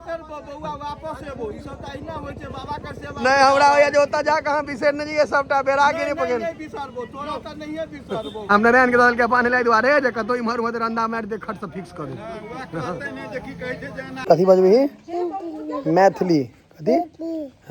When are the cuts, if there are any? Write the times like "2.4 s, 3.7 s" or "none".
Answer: 8.5 s, 14.2 s